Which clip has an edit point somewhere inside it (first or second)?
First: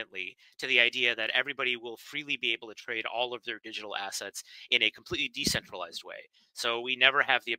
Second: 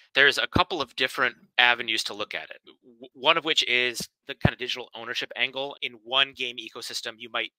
second